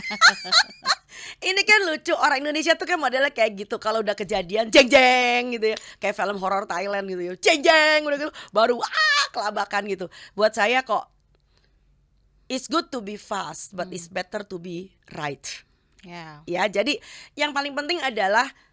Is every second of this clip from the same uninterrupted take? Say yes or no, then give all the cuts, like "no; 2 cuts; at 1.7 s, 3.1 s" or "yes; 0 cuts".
yes; 0 cuts